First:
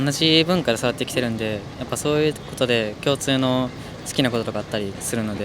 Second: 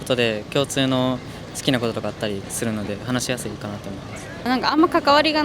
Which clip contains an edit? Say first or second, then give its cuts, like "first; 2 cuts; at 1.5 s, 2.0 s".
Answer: second; 1 cut; at 4.4 s